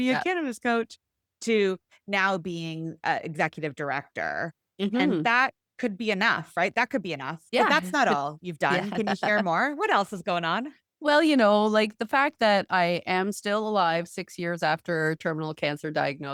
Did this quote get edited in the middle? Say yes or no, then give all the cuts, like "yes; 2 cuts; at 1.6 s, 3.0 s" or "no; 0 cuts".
no; 0 cuts